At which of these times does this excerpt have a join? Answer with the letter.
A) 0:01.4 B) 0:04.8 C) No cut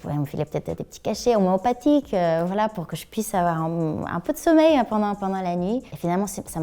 C